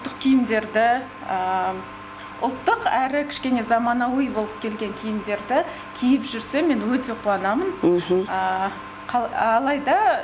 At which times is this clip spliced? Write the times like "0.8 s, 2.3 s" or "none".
none